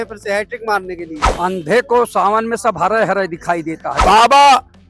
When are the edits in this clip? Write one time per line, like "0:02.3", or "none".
0:01.2
0:03.9